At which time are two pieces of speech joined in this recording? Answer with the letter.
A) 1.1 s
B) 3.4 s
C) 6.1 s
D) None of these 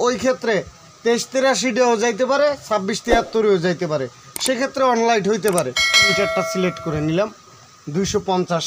C